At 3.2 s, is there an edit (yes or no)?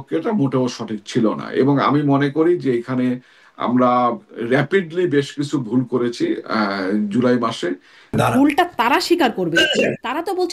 no